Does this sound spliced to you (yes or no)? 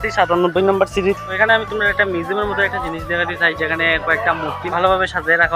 yes